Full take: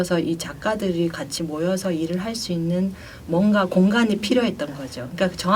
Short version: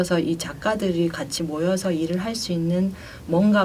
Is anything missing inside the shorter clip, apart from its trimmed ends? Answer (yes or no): no